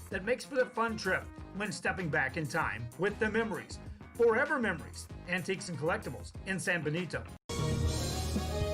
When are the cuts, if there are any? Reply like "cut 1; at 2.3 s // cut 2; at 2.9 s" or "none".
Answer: cut 1; at 7.4 s